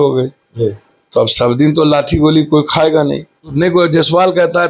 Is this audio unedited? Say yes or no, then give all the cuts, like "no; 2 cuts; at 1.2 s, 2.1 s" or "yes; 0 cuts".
no; 1 cut; at 3.5 s